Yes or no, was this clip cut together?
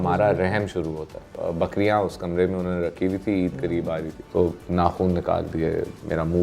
yes